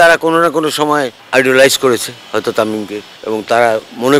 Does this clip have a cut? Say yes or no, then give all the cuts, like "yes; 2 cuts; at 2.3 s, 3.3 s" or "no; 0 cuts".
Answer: yes; 2 cuts; at 1.2 s, 3.1 s